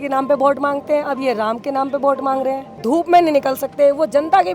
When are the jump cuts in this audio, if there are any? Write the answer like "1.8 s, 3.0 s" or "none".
2.7 s